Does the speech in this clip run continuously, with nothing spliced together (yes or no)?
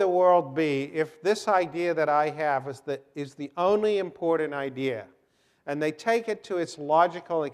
no